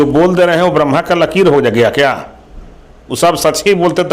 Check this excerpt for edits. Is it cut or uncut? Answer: uncut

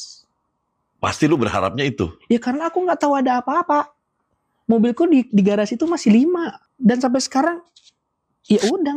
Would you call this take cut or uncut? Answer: cut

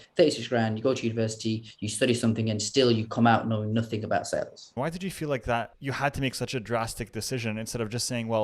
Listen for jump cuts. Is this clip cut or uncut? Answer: cut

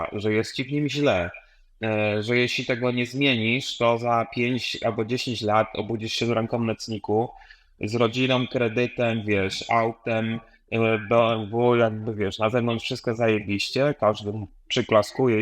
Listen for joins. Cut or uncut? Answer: uncut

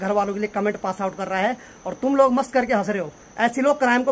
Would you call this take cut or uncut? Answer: cut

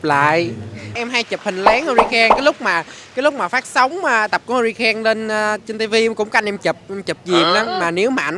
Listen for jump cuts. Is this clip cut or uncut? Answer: uncut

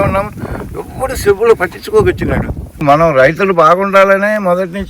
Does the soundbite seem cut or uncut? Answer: cut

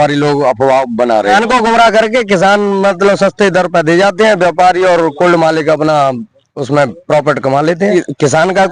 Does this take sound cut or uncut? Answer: cut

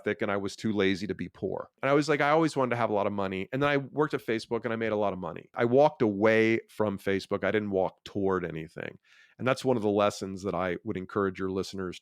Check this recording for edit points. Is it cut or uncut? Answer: cut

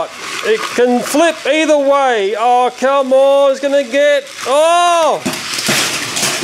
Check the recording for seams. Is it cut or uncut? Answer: uncut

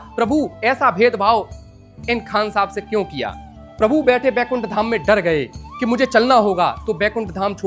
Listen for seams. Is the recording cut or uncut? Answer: cut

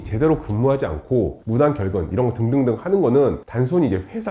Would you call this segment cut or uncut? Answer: uncut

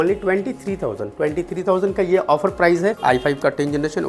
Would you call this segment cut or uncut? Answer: cut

